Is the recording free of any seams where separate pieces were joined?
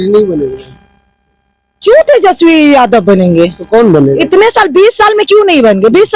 yes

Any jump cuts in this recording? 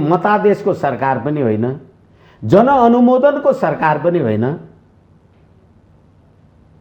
no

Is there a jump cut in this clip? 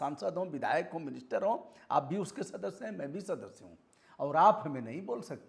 no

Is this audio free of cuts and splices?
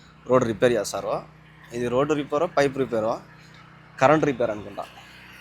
yes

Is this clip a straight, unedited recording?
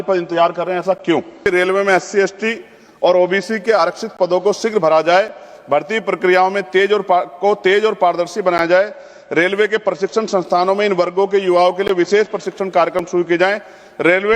no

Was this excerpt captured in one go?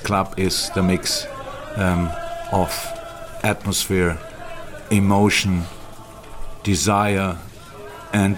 yes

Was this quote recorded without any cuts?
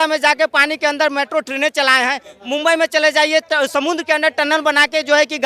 yes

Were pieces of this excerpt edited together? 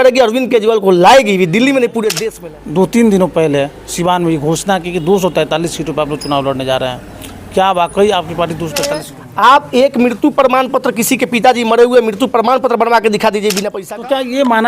yes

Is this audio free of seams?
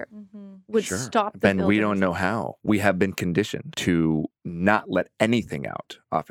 no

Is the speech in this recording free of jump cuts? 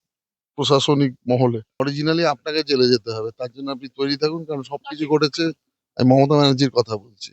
no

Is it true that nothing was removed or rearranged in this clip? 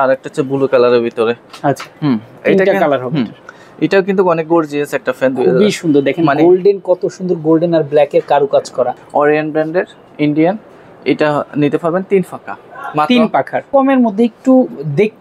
no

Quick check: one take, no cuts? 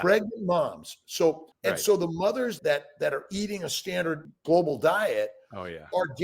no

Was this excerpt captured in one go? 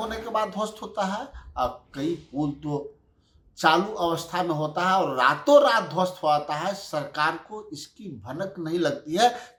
yes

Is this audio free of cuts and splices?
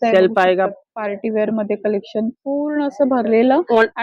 yes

